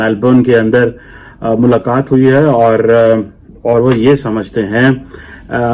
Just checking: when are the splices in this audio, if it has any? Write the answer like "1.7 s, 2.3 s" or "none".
none